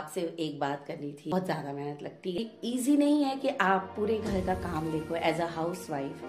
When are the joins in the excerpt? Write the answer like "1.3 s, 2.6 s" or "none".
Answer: 1.3 s, 2.4 s